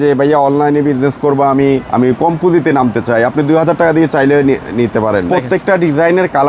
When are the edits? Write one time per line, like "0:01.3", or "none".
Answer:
0:01.9
0:05.3

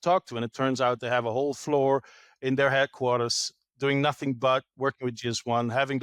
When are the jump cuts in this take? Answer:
none

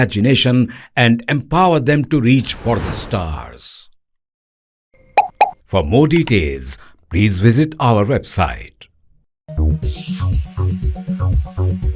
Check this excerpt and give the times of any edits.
0:09.3

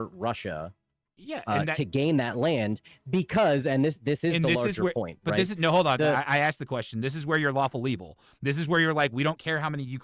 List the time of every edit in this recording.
none

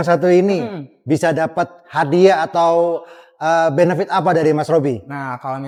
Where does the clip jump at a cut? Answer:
none

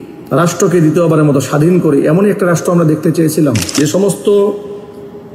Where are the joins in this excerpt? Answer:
0:03.8

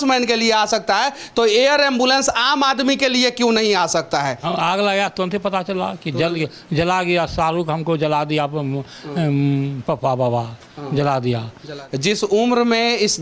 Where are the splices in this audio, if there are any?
0:04.4
0:11.8

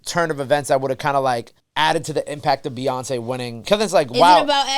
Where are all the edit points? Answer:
0:01.6
0:03.6

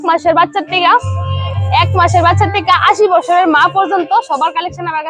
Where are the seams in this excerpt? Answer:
none

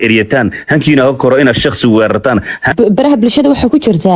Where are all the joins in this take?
0:02.6

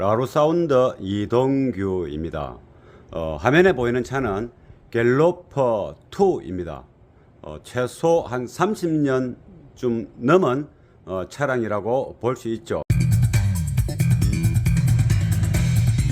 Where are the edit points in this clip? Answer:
0:12.9

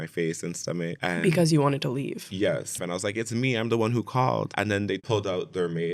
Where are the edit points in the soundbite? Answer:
0:01.0
0:02.8
0:04.5

